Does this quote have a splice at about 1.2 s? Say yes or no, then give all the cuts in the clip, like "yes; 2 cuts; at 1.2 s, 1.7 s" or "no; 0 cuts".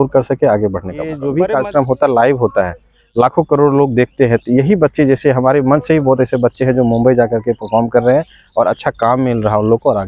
yes; 1 cut; at 1.2 s